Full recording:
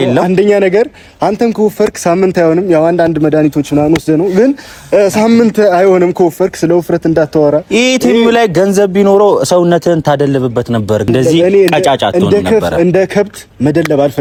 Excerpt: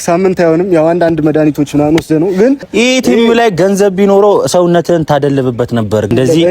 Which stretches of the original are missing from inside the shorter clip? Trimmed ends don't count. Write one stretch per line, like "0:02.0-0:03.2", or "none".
0:04.7-0:07.7

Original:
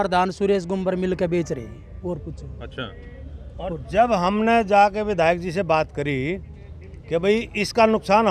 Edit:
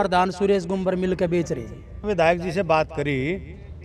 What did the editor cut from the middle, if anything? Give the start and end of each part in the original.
0:02.0-0:05.0

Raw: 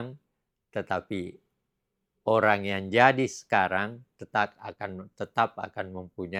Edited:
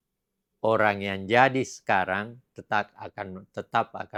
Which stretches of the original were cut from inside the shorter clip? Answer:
none

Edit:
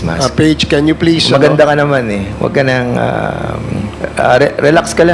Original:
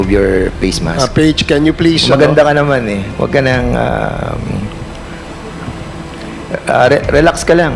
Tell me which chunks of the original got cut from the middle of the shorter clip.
0:04.8-0:06.5

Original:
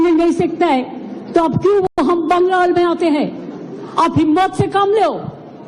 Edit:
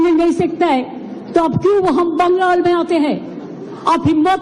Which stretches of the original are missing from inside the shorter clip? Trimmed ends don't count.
0:01.9-0:02.0

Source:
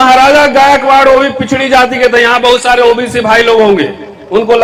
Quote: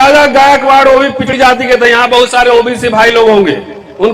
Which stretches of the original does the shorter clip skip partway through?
0:01.4-0:01.6

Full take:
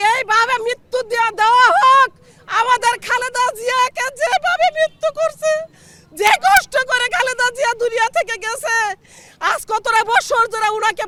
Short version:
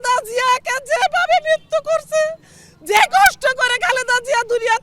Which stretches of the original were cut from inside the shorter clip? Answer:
none

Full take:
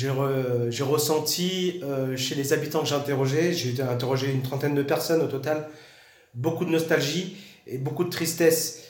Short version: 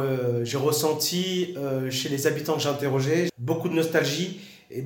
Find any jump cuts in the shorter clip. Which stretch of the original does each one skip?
0:03.6-0:06.3

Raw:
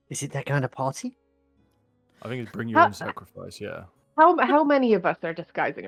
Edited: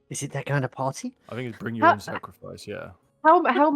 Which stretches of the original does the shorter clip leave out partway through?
0:01.2-0:02.2

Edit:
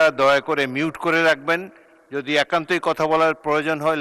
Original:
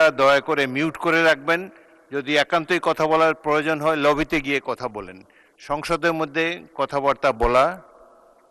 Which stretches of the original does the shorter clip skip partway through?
none

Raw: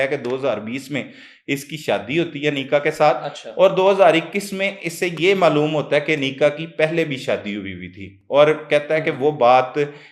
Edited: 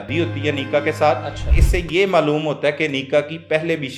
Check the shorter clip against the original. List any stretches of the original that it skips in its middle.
0:03.4-0:04.7

